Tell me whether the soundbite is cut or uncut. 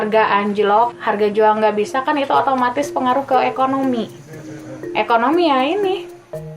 cut